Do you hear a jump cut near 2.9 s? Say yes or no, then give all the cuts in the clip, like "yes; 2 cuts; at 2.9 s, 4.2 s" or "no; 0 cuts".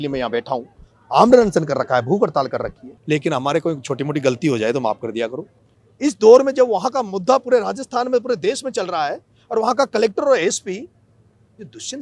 yes; 2 cuts; at 2.9 s, 5.8 s